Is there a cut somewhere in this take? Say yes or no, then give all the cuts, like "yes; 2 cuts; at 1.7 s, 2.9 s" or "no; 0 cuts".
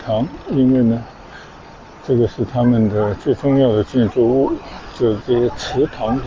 no; 0 cuts